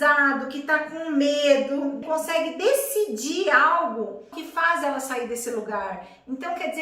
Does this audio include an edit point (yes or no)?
yes